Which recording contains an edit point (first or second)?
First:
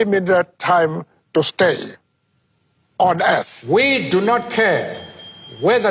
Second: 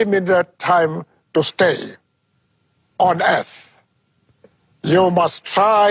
first